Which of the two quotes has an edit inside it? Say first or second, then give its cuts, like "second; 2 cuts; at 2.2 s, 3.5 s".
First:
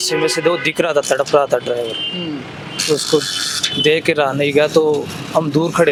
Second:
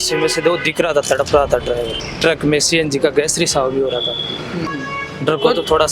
second; 2 cuts; at 2.0 s, 4.7 s